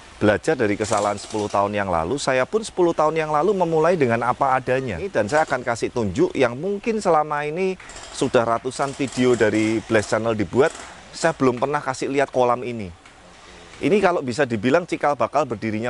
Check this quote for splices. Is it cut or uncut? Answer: cut